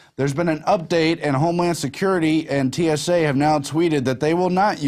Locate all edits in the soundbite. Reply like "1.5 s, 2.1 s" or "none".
none